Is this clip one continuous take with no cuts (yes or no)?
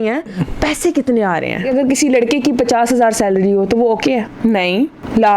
no